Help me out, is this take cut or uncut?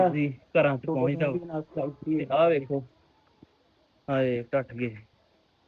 uncut